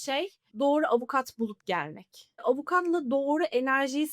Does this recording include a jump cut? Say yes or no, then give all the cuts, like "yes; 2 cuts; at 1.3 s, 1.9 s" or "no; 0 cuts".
yes; 1 cut; at 2.4 s